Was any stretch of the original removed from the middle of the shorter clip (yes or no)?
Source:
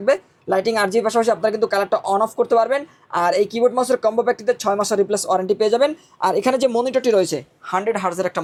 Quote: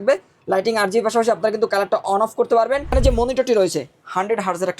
yes